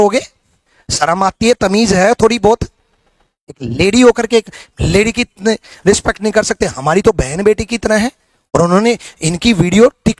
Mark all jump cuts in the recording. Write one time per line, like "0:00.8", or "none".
none

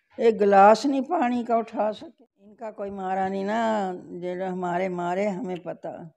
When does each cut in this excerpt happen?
0:02.8

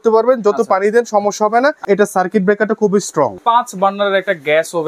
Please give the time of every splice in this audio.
0:01.8
0:03.4

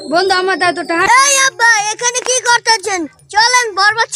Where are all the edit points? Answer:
0:01.1

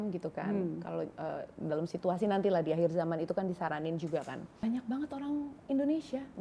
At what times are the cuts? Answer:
0:04.6

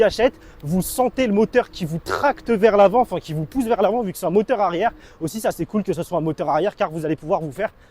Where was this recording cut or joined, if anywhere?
0:06.7

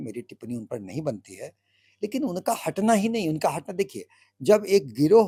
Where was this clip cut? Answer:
none

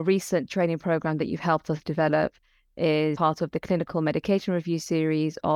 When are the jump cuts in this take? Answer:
0:03.2

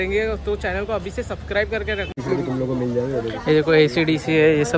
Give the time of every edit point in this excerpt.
0:02.2

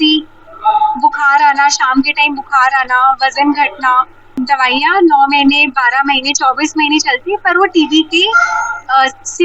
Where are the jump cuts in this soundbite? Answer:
0:04.3

